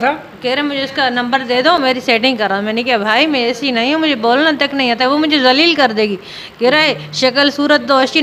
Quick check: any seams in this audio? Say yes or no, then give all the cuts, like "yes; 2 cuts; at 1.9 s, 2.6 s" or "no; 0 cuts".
no; 0 cuts